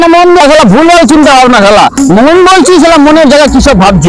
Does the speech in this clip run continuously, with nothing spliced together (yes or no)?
yes